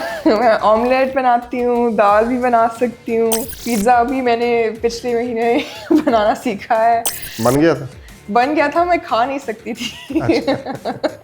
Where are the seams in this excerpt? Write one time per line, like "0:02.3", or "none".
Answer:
0:03.5